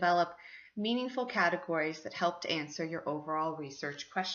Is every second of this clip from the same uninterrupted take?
no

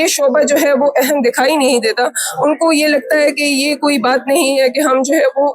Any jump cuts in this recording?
no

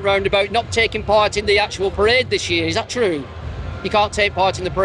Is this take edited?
no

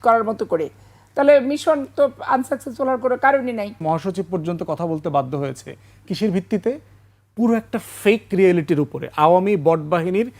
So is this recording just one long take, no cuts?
no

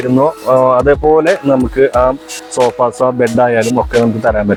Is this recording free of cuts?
yes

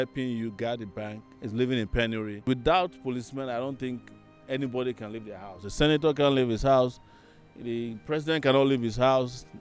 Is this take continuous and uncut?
no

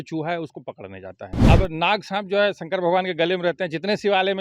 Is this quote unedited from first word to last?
no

